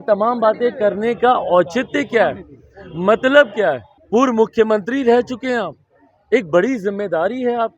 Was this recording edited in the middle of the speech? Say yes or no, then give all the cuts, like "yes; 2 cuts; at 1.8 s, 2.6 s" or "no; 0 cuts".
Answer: yes; 1 cut; at 3.9 s